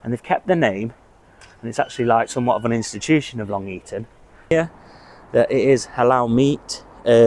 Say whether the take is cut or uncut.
cut